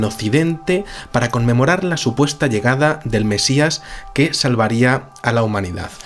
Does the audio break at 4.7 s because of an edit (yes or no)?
yes